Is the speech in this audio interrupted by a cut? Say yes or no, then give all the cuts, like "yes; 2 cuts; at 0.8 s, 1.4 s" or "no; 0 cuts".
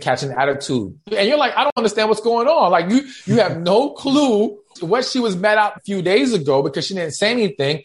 yes; 3 cuts; at 1.1 s, 4.7 s, 5.8 s